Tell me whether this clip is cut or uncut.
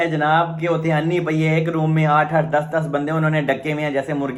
uncut